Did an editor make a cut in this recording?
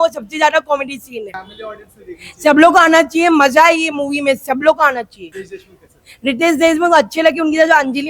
no; 0 cuts

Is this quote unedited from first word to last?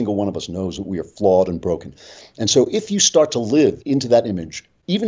no; 1 cut; at 3.8 s

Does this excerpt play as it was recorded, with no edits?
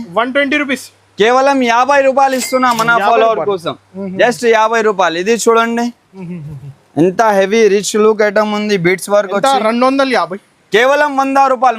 no; 1 cut; at 6.1 s

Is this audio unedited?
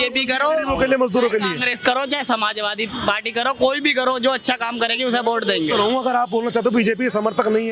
yes; 0 cuts

